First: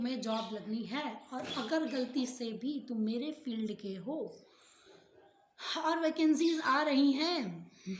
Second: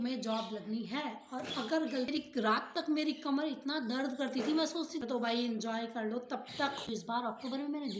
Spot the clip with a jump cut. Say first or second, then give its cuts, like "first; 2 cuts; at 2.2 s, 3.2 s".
second; 3 cuts; at 2.1 s, 4.9 s, 6.9 s